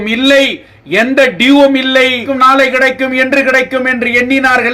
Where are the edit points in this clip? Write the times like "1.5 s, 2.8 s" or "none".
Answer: 2.3 s

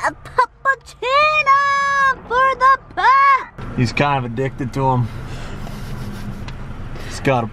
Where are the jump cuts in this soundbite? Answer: none

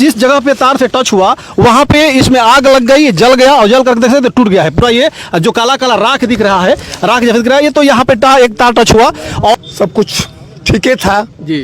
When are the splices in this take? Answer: 9.5 s

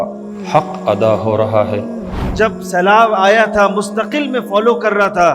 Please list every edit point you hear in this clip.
1.9 s

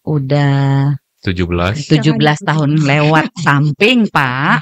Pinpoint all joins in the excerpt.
1.1 s

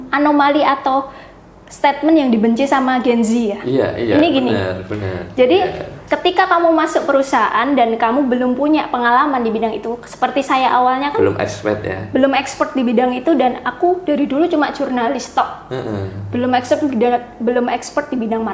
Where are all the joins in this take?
none

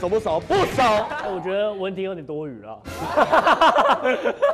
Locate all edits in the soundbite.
1.1 s

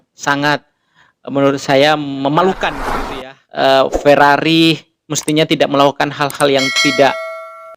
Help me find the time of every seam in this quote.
2.9 s

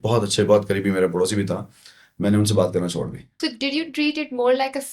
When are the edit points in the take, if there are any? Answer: 3.3 s

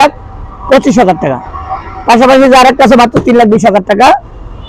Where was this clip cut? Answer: none

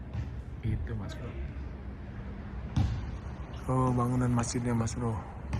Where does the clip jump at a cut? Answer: none

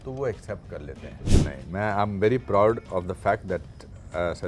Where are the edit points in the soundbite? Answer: 1.3 s

